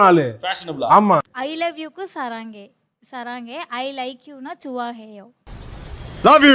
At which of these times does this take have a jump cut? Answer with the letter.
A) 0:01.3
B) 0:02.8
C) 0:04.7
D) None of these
A